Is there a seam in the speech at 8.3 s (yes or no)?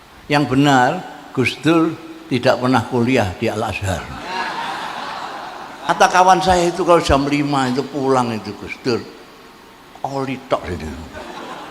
no